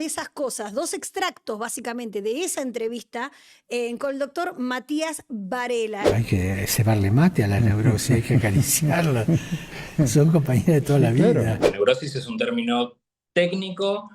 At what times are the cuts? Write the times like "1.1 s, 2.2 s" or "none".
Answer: 6.1 s, 11.6 s